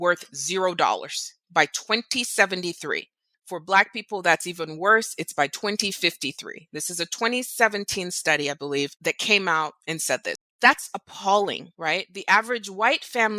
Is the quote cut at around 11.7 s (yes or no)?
yes